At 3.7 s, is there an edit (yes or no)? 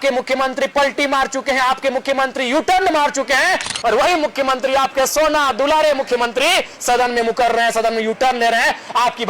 yes